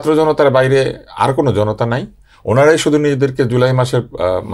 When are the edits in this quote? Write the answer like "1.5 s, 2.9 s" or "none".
none